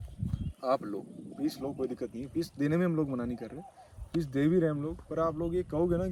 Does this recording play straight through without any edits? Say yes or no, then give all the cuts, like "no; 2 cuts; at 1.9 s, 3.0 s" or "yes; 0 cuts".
yes; 0 cuts